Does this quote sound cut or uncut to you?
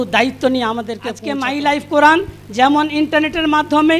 cut